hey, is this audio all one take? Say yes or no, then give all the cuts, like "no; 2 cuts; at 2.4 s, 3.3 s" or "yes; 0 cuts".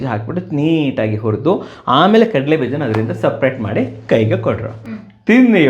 yes; 0 cuts